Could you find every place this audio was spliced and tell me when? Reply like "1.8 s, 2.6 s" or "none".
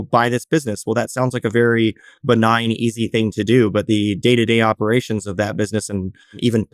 none